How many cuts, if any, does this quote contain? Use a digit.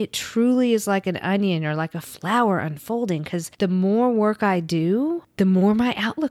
2